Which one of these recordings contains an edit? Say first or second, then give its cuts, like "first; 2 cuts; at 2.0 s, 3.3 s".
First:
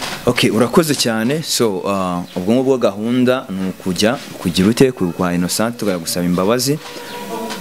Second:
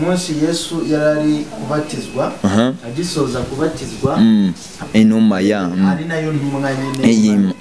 second; 1 cut; at 4.8 s